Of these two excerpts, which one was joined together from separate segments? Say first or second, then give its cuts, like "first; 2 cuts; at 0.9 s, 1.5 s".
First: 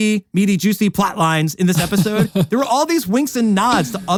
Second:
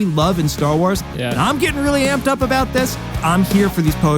second; 2 cuts; at 1.0 s, 3.0 s